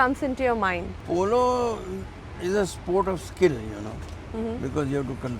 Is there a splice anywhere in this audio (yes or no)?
yes